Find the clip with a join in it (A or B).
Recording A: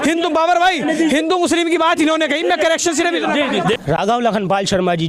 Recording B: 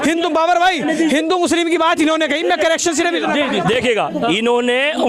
A